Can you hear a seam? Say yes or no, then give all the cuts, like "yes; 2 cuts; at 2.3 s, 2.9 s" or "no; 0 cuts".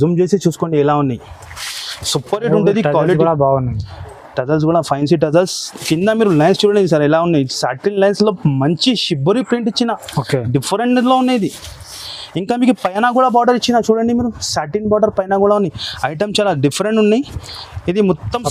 no; 0 cuts